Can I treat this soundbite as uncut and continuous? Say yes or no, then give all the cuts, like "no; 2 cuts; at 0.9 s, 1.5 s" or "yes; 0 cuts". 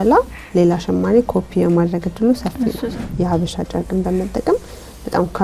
no; 1 cut; at 3.0 s